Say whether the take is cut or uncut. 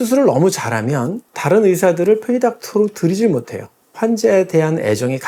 uncut